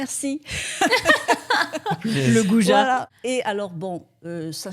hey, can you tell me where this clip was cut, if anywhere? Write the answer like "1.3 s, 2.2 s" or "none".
3.1 s